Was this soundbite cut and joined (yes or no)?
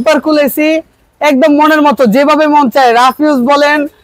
no